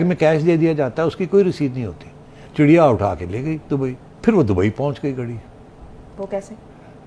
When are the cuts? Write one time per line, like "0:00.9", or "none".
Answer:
0:02.4
0:04.1